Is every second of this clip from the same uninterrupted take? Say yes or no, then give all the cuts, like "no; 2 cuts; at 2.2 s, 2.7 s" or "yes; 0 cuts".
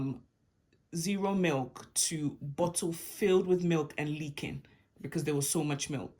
yes; 0 cuts